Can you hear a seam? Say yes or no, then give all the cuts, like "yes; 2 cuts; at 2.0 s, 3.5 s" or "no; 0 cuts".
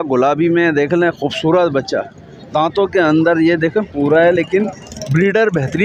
no; 0 cuts